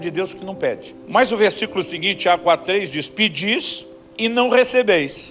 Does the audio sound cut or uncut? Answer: cut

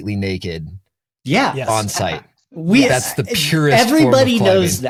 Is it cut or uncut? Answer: uncut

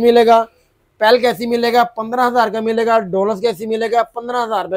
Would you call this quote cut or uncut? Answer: uncut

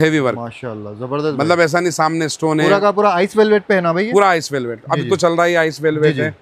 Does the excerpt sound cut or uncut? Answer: uncut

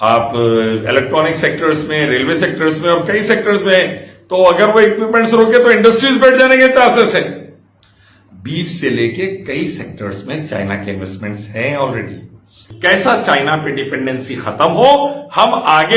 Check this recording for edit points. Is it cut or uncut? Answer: cut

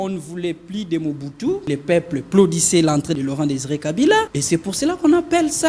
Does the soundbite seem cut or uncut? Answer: cut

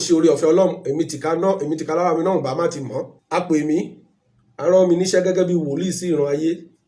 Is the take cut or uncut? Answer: cut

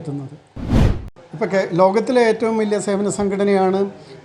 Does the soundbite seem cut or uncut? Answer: cut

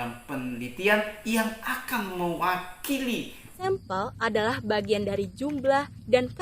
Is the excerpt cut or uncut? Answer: cut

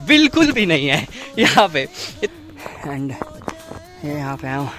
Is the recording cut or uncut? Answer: cut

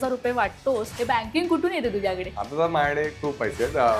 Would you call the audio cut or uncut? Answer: cut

